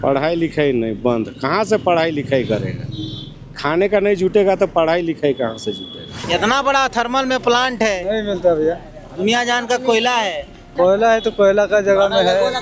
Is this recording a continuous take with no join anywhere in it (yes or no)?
no